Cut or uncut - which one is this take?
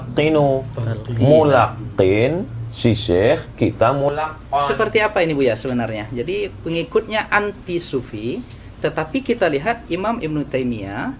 cut